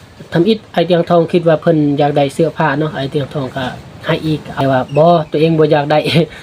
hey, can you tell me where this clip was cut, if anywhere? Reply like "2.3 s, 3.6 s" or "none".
4.5 s